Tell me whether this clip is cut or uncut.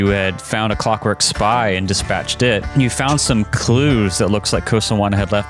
cut